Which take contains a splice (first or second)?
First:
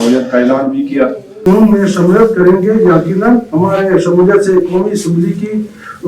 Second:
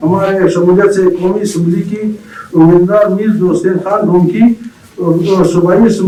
first